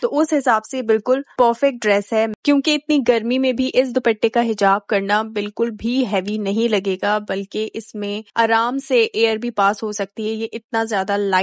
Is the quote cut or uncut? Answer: uncut